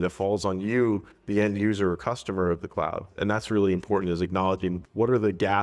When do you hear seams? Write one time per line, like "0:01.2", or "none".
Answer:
0:03.2
0:04.8